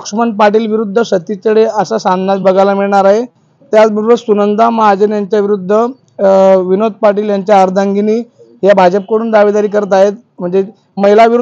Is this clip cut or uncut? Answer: uncut